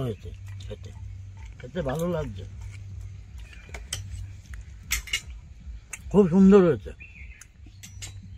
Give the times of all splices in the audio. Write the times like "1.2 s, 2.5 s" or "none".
7.5 s